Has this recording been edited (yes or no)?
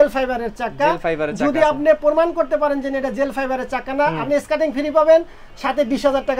no